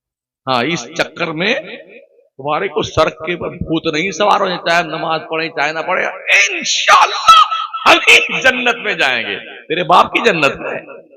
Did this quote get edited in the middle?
no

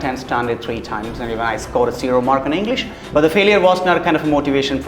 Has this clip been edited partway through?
yes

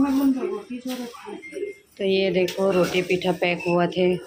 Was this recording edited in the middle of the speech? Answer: no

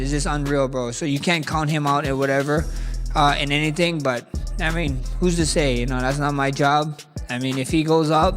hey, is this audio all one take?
yes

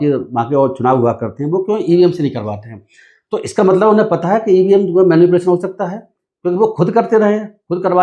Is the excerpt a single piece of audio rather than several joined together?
yes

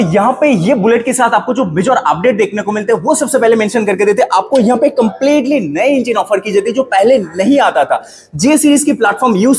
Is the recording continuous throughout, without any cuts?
yes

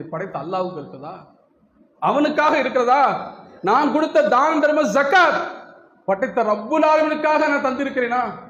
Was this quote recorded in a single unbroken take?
yes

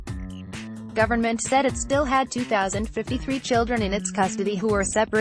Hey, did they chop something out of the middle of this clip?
yes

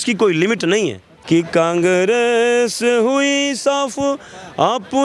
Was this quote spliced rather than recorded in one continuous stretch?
yes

